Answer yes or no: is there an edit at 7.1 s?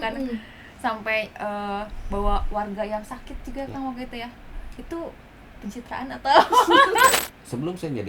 yes